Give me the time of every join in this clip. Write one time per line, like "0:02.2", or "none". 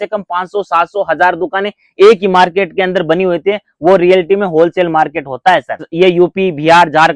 0:05.9